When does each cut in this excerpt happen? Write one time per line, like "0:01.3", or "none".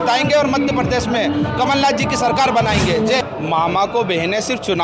0:03.2